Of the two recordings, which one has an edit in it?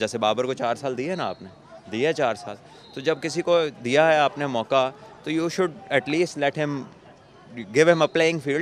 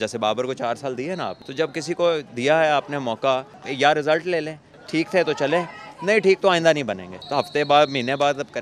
second; 4 cuts; at 1.4 s, 3.6 s, 4.7 s, 7.2 s

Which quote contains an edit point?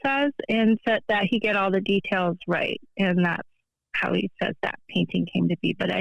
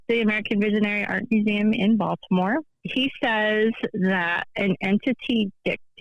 second; 1 cut; at 2.8 s

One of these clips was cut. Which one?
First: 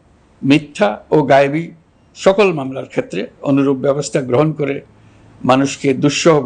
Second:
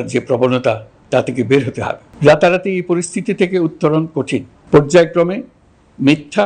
second; 2 cuts; at 2.0 s, 4.5 s

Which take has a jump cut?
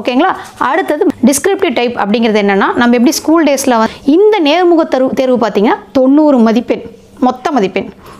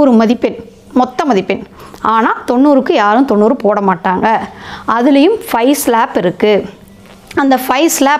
first; 2 cuts; at 1.1 s, 3.8 s

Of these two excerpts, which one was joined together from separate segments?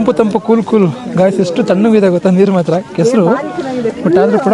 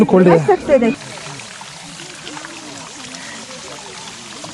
second; 1 cut; at 1.0 s

